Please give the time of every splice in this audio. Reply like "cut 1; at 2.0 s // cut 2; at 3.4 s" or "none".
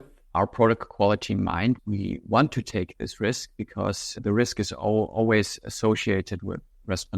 cut 1; at 1.8 s